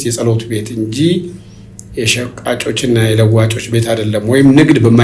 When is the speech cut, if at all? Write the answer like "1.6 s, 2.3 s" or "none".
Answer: none

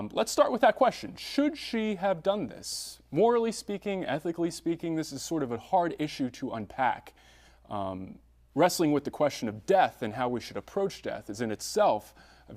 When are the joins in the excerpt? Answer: 10.4 s

